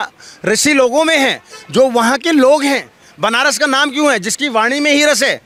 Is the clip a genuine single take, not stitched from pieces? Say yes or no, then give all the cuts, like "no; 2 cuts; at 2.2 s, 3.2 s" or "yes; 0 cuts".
yes; 0 cuts